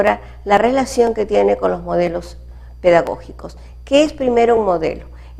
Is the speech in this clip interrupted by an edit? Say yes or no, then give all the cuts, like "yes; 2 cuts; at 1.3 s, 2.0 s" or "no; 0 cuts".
no; 0 cuts